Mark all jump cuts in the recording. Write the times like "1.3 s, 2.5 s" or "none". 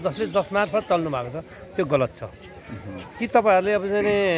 none